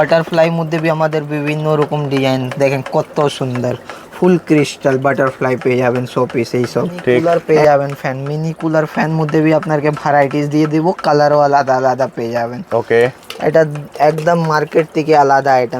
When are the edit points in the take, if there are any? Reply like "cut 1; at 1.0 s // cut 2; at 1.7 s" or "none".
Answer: cut 1; at 7.2 s

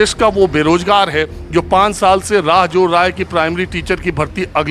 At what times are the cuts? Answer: none

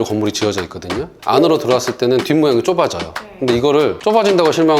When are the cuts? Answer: cut 1; at 1.0 s

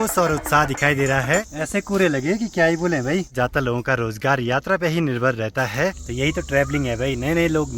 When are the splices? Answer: cut 1; at 1.4 s // cut 2; at 3.3 s // cut 3; at 6.0 s

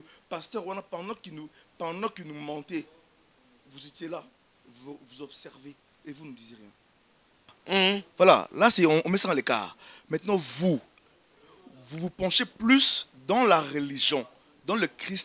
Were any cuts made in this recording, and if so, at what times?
cut 1; at 7.6 s

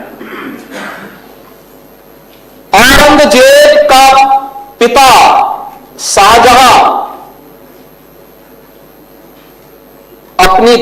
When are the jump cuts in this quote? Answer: none

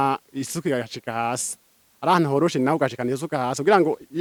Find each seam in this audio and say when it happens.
none

